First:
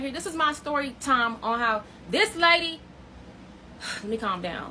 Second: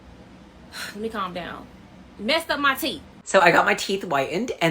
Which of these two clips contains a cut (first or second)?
second